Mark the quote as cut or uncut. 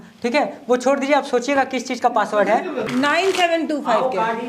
cut